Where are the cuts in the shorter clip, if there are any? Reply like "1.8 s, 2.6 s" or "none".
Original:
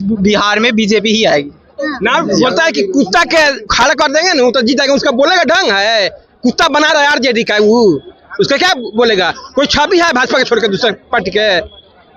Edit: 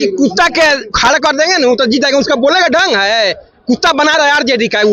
none